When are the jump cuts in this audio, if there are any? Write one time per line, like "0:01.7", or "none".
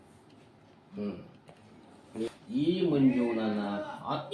0:02.3

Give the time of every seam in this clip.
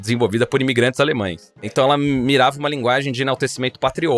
0:01.7

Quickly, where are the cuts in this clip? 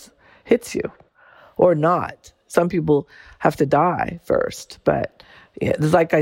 0:01.3

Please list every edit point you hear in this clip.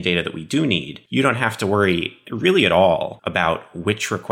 0:01.0
0:03.2

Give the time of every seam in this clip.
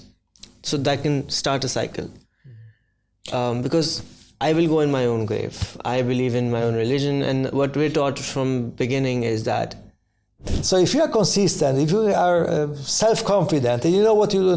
0:10.5

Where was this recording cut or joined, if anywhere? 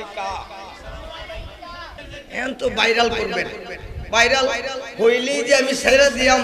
0:01.9

